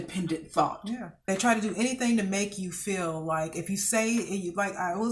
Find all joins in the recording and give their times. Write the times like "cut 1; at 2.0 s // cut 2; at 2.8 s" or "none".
cut 1; at 1.2 s